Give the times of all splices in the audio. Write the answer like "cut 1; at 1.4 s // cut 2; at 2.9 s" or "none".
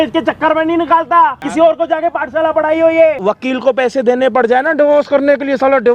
cut 1; at 1.4 s // cut 2; at 3.2 s